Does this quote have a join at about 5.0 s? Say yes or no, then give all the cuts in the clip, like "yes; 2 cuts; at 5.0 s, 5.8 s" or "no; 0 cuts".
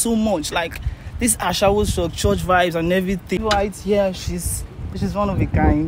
yes; 2 cuts; at 3.4 s, 5.0 s